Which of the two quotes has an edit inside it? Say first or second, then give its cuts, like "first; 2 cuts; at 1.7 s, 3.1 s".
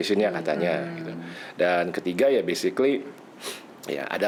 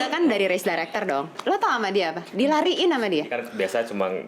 second; 2 cuts; at 1.3 s, 3.4 s